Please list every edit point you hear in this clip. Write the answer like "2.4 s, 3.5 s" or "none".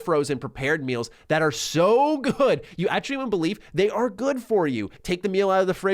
5.0 s

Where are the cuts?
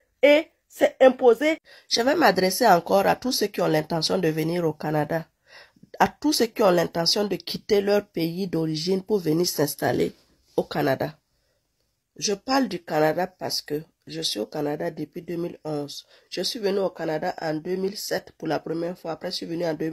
1.7 s

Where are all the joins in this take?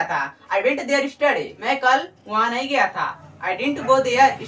1.5 s, 3.2 s

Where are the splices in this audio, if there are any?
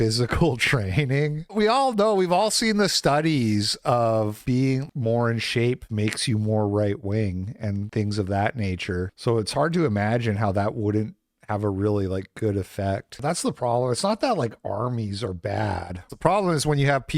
13.2 s, 16.1 s

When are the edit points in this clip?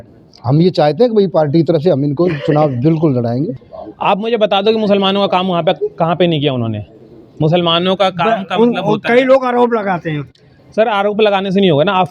3.6 s

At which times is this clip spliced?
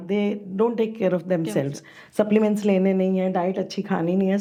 none

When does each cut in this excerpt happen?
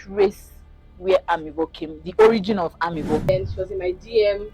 3.2 s

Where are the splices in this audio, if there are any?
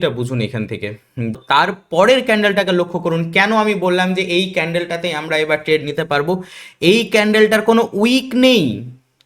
1.4 s

